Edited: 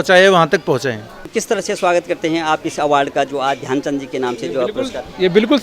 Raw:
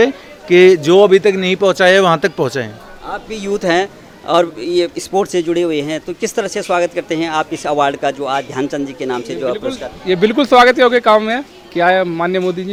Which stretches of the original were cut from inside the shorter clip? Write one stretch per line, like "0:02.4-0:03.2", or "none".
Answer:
0:02.9-0:06.1